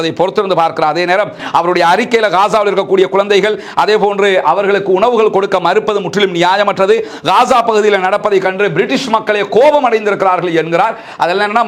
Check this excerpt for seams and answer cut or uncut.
uncut